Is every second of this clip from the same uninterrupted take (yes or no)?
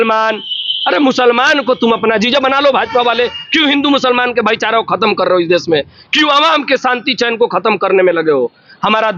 yes